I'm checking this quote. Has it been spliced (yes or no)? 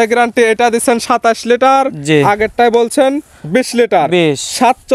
no